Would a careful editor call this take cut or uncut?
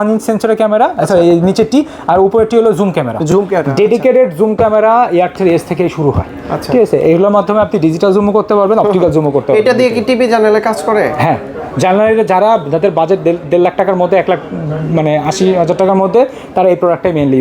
uncut